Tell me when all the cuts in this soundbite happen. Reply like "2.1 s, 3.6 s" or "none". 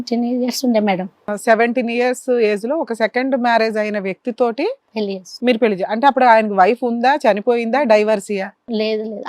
1.4 s